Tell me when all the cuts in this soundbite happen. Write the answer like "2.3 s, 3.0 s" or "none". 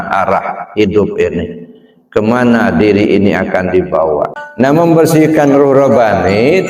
4.4 s